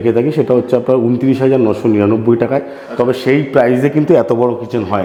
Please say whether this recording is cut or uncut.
uncut